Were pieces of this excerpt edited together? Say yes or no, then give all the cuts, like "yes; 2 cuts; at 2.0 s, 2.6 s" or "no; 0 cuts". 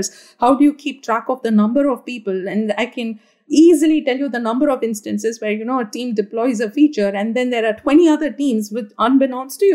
no; 0 cuts